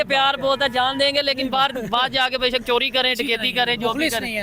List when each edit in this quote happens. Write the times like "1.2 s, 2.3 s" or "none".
none